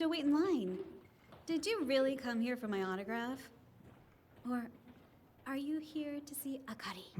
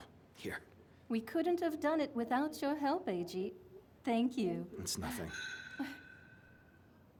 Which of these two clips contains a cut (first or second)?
first